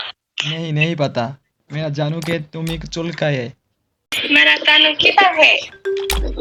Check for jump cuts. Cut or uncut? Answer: uncut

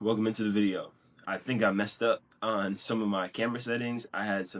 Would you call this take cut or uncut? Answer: cut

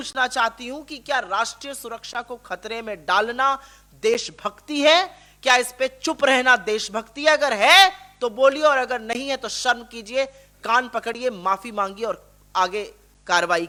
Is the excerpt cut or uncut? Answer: uncut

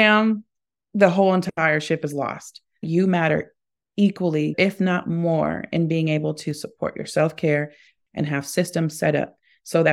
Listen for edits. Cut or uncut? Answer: cut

